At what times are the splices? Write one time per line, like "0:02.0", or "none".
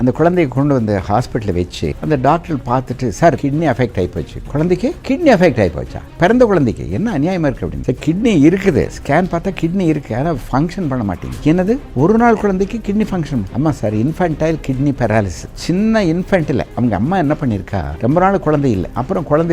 none